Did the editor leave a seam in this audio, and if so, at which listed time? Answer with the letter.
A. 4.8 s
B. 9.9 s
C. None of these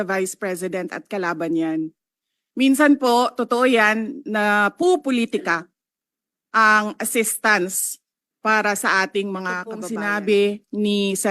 B